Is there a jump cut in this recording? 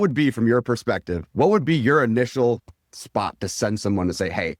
yes; 1 cut; at 1.2 s

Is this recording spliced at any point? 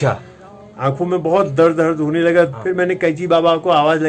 yes; 1 cut; at 2.6 s

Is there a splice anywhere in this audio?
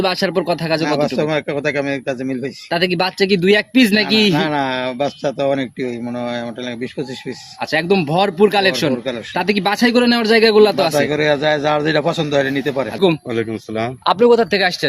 yes; 1 cut; at 13.0 s

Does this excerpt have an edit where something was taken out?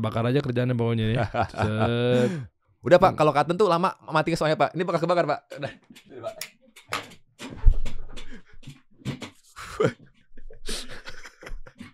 no; 0 cuts

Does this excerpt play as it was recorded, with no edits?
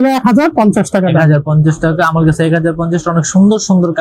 yes; 0 cuts

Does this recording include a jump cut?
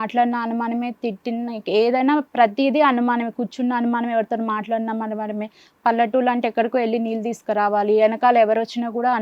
no; 0 cuts

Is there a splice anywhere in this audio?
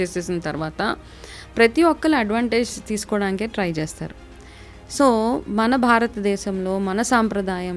no; 0 cuts

